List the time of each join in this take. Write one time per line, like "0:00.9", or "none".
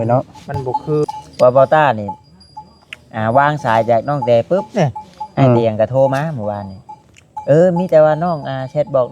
0:01.0

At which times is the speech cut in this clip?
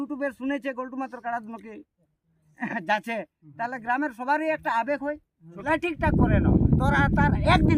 0:05.6

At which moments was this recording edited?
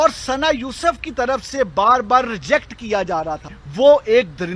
0:03.6

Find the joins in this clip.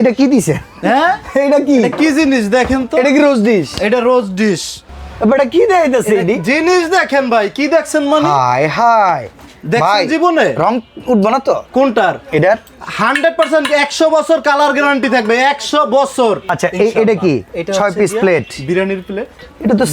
0:04.9
0:16.5

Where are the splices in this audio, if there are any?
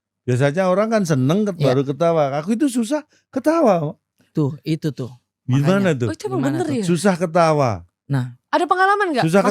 none

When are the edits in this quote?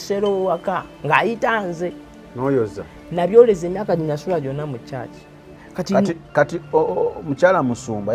0:05.7

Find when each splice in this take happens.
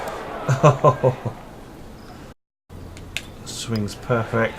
0:02.5

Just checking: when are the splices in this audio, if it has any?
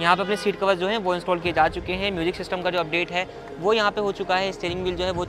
none

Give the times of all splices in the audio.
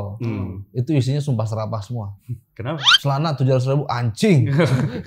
none

